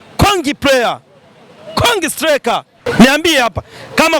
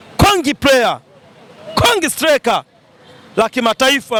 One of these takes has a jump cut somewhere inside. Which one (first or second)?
first